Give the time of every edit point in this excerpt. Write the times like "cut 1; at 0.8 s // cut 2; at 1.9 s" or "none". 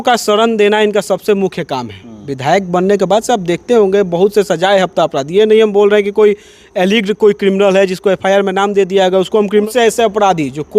cut 1; at 9.6 s